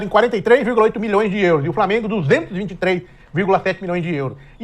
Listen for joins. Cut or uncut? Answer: uncut